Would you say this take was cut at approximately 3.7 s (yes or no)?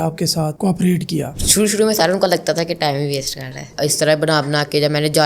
yes